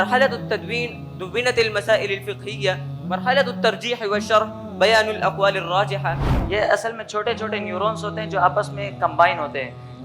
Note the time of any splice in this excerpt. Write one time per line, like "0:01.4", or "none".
0:06.3